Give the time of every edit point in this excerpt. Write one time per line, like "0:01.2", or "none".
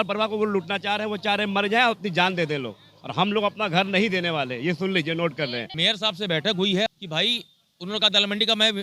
0:05.7
0:06.9